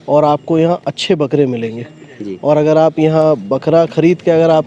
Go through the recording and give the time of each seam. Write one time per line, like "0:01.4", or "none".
none